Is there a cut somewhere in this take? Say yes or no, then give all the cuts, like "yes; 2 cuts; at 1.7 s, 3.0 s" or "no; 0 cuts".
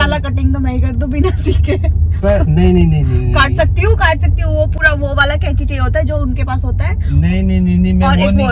no; 0 cuts